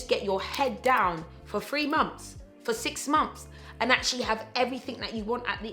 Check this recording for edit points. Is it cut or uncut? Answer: uncut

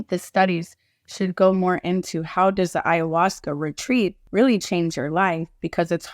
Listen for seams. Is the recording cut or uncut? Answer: cut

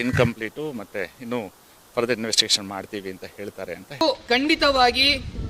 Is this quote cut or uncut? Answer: cut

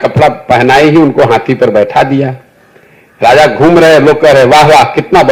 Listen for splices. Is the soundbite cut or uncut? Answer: uncut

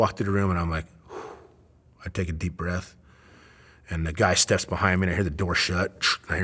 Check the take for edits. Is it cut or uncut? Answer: uncut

